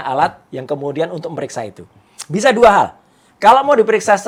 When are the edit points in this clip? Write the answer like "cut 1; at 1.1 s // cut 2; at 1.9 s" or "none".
none